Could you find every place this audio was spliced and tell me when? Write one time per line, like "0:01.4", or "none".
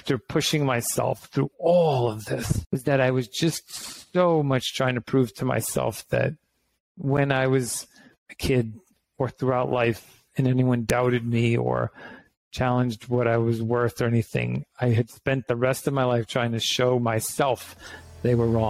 none